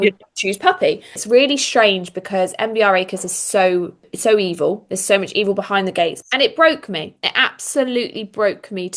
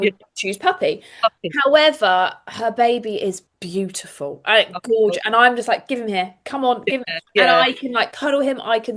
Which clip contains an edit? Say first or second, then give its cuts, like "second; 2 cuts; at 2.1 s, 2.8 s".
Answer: first; 2 cuts; at 1.2 s, 6.2 s